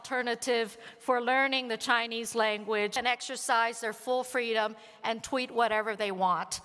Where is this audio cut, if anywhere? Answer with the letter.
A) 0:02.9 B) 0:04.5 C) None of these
A